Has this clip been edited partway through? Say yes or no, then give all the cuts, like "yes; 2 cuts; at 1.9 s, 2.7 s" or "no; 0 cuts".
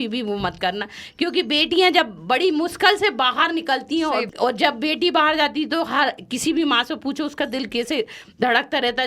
yes; 1 cut; at 4.3 s